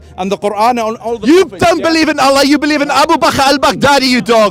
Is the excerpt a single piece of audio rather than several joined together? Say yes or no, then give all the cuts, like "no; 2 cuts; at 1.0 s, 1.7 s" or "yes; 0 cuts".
yes; 0 cuts